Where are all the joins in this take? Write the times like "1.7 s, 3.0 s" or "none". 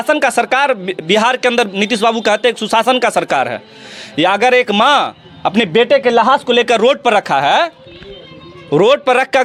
none